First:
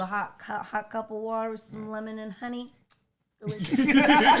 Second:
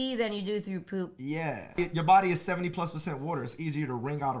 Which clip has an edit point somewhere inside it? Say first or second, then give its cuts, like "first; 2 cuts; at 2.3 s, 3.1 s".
second; 1 cut; at 1.8 s